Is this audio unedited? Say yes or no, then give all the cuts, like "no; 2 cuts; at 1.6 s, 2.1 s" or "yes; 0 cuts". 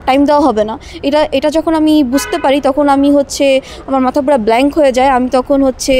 yes; 0 cuts